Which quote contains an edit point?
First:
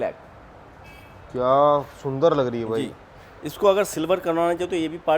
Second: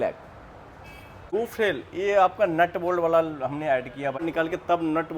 second; 2 cuts; at 1.3 s, 4.2 s

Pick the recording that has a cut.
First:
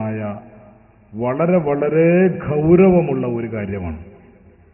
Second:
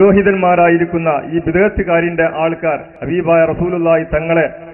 second; 1 cut; at 2.9 s

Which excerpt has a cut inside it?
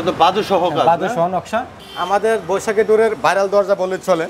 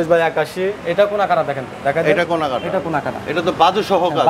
first; 1 cut; at 1.8 s

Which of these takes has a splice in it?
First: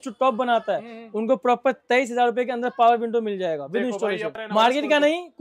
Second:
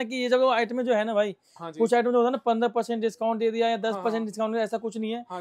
first; 1 cut; at 4.4 s

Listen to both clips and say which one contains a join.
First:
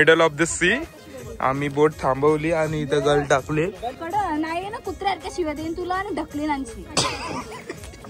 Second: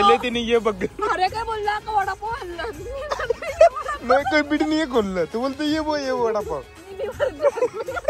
first; 1 cut; at 4.0 s

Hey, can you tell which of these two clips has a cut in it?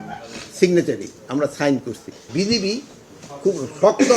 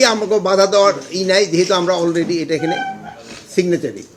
first; 1 cut; at 2.3 s

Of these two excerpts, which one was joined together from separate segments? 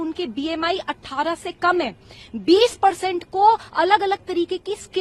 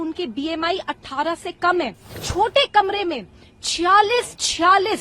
second; 1 cut; at 2.2 s

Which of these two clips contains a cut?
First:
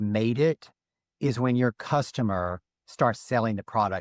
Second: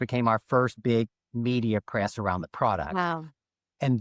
second; 1 cut; at 1.1 s

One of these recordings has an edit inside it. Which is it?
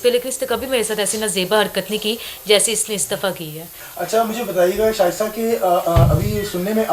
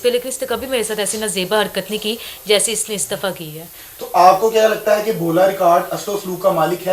first; 1 cut; at 3.8 s

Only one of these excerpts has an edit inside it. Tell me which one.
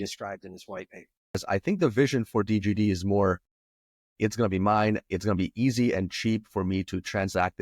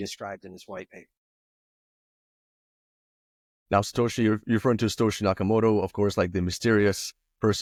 first; 1 cut; at 1.4 s

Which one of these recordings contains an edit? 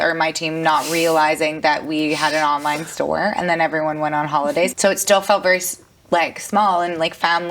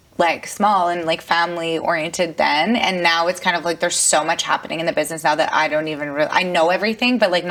first; 1 cut; at 4.7 s

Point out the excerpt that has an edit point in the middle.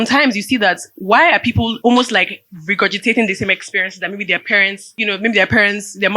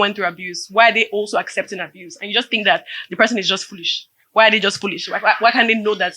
first; 2 cuts; at 1.7 s, 4.8 s

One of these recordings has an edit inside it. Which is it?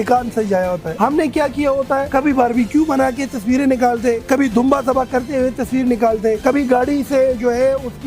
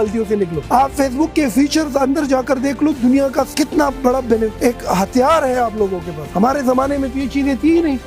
first; 1 cut; at 0.9 s

